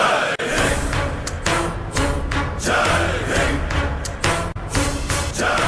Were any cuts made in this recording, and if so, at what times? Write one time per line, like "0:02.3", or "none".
0:01.3